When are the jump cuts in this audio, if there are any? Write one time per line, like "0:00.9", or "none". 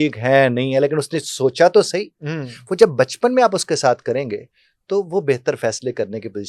none